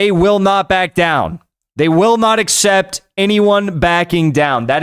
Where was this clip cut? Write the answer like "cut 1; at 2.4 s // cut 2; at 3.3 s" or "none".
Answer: none